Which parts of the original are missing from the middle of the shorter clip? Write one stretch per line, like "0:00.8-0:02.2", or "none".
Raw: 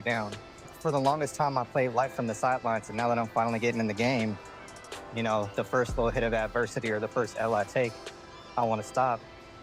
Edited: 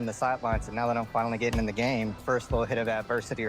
0:04.4-0:05.7